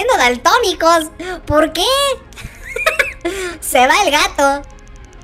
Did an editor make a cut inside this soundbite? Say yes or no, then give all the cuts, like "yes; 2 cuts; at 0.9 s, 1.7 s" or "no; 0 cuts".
no; 0 cuts